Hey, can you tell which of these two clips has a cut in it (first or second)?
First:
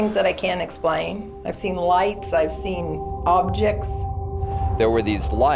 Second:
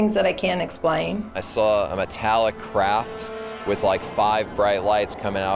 second